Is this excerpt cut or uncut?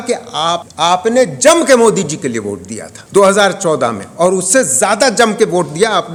uncut